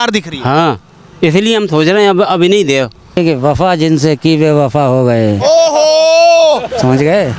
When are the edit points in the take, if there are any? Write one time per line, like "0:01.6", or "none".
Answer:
0:03.2